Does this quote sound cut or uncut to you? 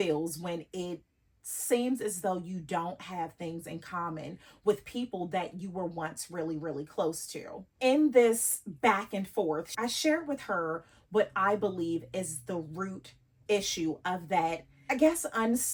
uncut